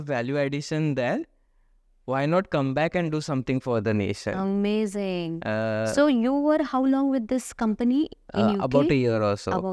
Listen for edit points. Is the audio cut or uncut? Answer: uncut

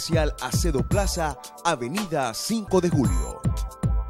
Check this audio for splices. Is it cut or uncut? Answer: cut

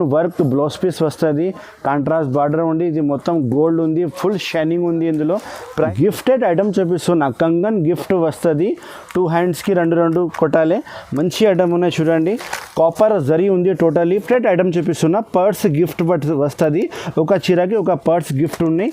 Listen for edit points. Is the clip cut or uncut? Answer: cut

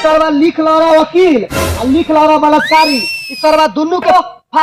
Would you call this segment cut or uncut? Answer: uncut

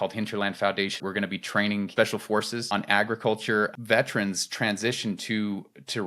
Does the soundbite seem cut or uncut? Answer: cut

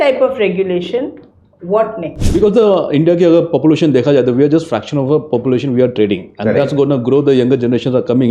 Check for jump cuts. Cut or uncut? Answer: cut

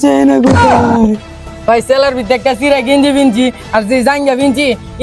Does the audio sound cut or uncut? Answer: cut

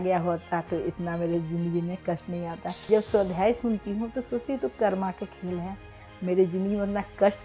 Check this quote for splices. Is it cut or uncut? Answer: cut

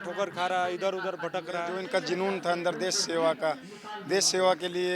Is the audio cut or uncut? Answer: cut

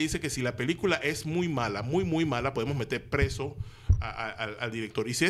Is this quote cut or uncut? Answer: uncut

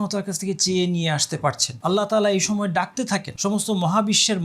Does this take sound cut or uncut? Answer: cut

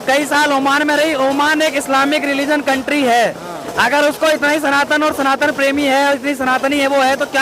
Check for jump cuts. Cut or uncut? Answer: uncut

